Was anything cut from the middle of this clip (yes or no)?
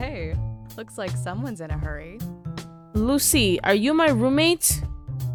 no